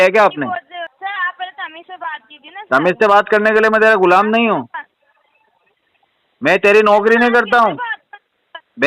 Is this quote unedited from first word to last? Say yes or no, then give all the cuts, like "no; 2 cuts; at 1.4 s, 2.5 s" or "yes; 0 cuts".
no; 1 cut; at 0.9 s